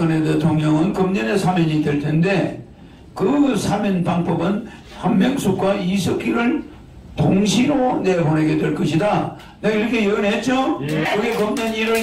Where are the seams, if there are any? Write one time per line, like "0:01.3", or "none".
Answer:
0:11.1